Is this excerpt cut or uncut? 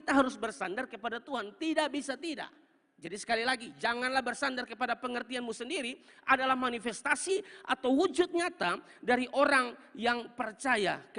uncut